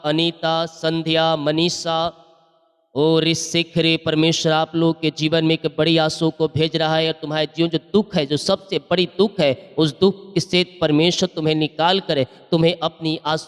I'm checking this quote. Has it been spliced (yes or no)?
no